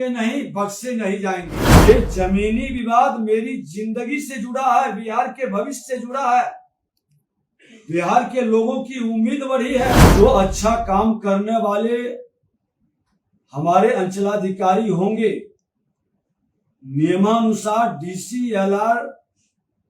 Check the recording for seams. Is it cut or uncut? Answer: cut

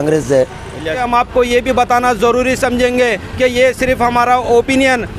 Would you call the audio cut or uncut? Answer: cut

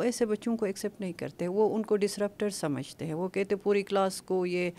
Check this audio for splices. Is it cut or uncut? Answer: uncut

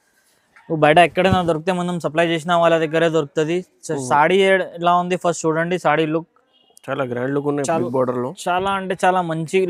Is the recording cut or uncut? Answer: uncut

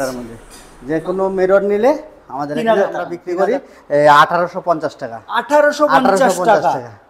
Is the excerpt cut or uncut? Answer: cut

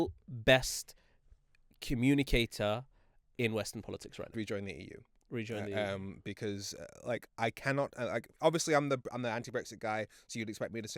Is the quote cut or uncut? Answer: cut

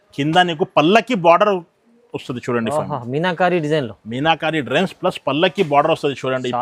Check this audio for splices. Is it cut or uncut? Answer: uncut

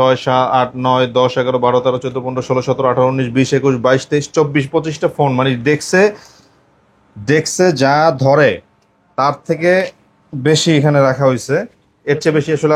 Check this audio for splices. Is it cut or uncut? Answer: uncut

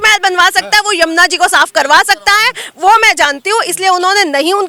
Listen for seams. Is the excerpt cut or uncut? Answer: uncut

